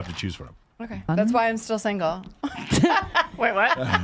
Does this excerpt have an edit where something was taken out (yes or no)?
yes